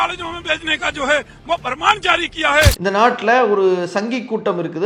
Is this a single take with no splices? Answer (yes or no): yes